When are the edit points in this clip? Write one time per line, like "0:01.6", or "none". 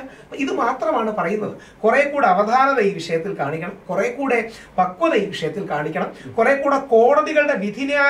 none